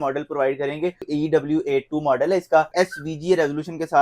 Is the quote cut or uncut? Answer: cut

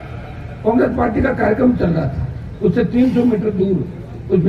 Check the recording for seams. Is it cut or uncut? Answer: uncut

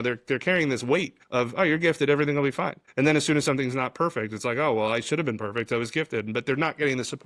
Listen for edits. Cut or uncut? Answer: cut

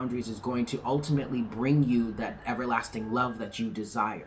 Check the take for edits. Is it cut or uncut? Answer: uncut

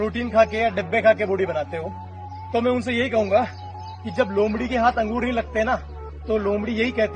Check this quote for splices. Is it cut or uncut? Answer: uncut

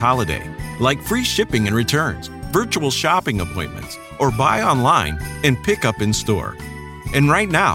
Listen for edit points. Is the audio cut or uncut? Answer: uncut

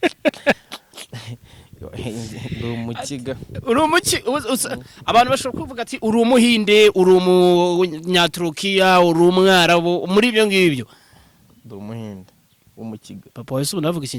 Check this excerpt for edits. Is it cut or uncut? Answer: uncut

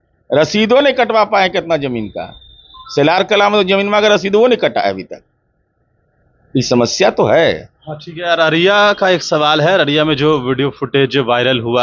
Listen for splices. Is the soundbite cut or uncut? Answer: uncut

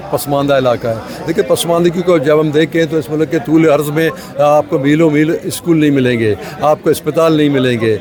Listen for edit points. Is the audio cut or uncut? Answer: uncut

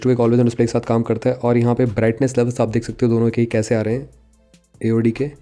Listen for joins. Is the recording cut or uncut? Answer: uncut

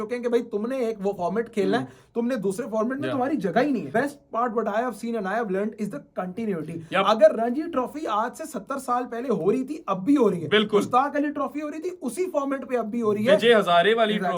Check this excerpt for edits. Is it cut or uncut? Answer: cut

